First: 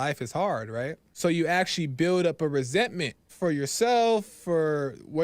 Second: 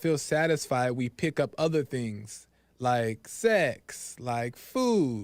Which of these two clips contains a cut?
first; 2 cuts; at 1.0 s, 3.3 s

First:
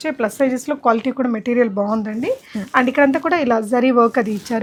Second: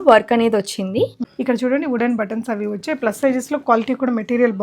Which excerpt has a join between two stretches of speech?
second; 1 cut; at 1.3 s

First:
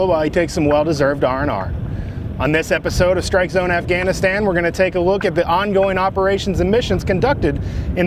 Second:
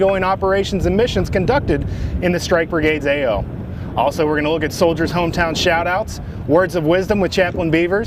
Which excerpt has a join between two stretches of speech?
second; 1 cut; at 3.5 s

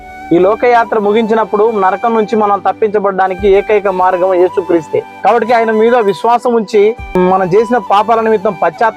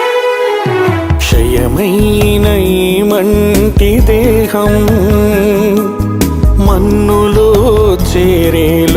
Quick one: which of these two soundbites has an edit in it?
first; 2 cuts; at 5.1 s, 7.2 s

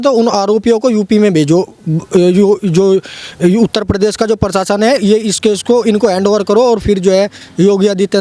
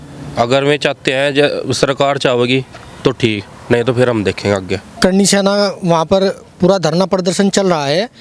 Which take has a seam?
second; 1 cut; at 4.9 s

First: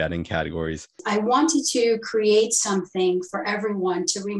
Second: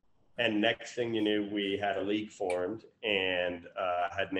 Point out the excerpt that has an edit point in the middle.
first; 1 cut; at 1.0 s

